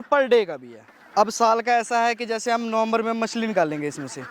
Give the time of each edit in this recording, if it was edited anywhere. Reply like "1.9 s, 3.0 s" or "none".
none